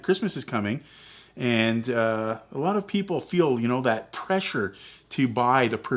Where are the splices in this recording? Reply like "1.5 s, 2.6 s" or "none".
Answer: none